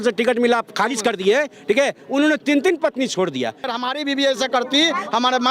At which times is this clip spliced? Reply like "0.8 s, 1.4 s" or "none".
3.7 s